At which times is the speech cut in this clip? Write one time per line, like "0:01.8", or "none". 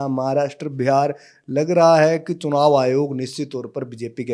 none